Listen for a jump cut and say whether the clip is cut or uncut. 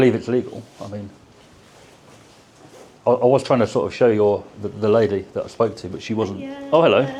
uncut